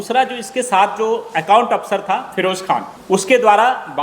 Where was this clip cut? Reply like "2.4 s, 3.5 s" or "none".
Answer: 2.9 s